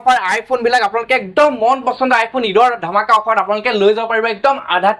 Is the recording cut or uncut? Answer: uncut